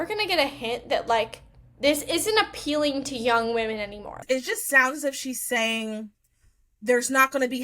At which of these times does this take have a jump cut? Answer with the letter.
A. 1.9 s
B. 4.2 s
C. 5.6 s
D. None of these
B